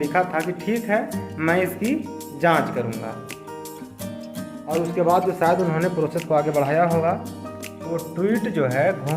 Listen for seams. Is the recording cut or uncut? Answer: cut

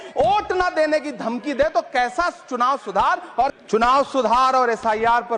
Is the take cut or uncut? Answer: cut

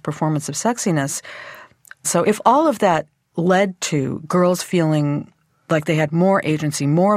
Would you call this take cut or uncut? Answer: cut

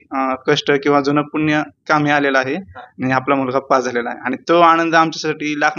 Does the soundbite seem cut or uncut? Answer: uncut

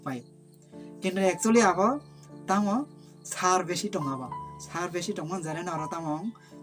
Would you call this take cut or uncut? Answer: uncut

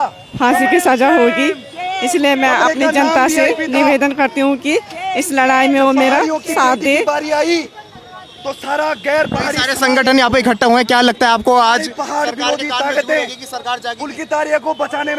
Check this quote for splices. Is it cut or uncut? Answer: uncut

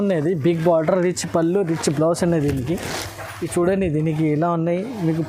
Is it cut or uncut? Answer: uncut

